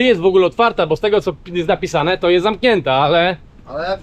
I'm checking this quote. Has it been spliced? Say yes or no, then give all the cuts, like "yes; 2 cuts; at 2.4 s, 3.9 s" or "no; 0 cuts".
no; 0 cuts